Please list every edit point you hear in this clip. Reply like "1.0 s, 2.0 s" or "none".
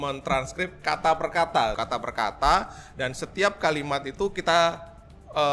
1.8 s

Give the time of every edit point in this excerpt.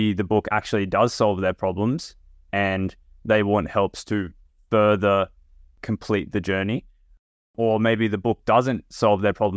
5.8 s

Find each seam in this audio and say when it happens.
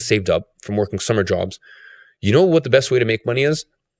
none

